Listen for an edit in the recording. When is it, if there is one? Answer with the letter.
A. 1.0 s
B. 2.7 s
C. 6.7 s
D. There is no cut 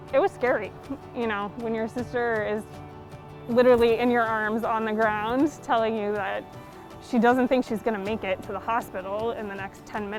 D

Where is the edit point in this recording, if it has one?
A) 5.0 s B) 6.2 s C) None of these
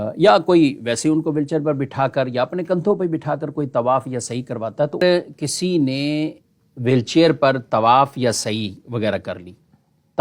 A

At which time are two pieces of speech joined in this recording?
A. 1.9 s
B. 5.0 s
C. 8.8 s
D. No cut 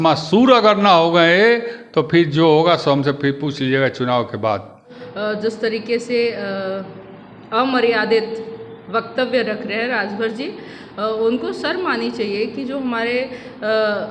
B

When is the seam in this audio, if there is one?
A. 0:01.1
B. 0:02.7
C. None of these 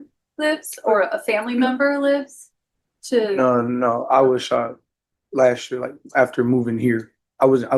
C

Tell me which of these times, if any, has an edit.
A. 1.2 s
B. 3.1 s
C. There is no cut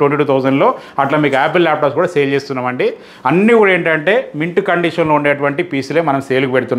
C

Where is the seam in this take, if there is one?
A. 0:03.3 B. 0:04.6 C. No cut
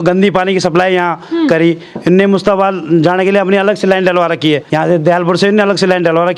B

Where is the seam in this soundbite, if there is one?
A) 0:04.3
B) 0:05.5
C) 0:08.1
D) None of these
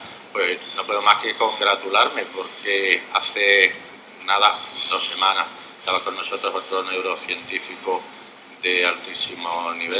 C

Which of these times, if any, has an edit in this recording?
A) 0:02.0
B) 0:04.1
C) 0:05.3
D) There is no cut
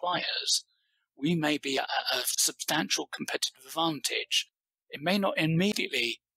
A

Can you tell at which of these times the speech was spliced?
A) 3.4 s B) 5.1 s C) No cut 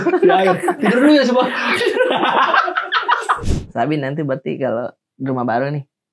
A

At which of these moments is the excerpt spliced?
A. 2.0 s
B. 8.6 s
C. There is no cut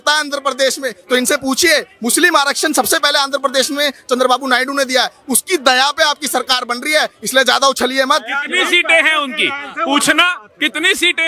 C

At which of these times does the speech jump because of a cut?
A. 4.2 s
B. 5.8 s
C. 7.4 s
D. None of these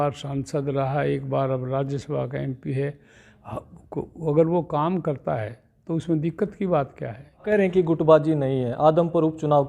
C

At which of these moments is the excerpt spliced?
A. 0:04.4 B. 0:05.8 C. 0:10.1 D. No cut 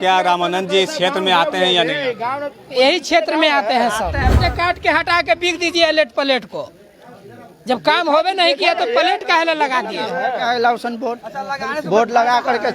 A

